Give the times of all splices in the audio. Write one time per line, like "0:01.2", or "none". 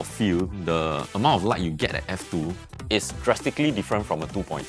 none